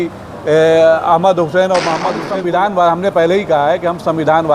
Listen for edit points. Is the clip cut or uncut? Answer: cut